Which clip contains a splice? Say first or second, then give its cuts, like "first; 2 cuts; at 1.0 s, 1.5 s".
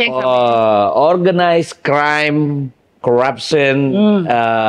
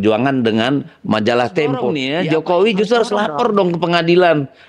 second; 1 cut; at 2.0 s